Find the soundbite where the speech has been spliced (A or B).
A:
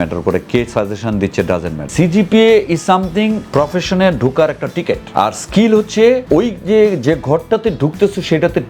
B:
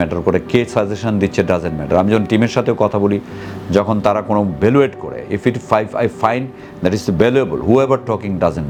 A